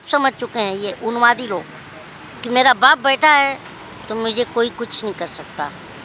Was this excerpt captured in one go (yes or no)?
yes